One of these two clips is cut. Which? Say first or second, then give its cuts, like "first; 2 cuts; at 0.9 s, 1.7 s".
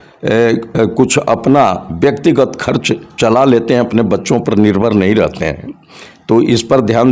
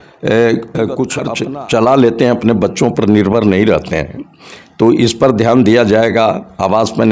second; 1 cut; at 1.3 s